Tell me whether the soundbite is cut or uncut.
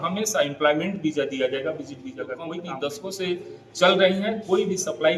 cut